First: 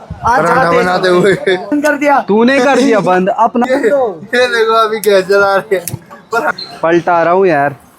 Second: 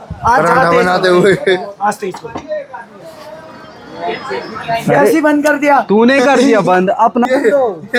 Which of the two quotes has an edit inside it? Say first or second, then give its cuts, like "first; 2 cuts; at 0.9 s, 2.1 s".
first; 2 cuts; at 1.7 s, 6.6 s